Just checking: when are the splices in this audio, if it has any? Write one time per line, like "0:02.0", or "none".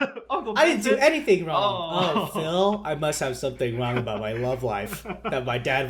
none